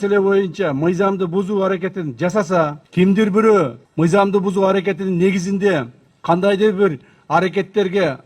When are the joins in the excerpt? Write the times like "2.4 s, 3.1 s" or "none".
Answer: 2.8 s, 3.8 s